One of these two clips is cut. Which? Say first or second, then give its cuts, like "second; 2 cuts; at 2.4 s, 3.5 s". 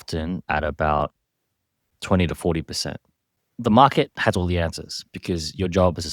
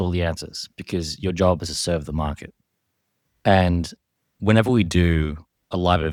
first; 1 cut; at 3.4 s